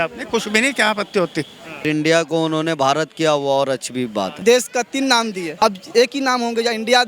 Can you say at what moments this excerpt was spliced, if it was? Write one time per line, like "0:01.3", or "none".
0:01.8
0:04.4
0:05.5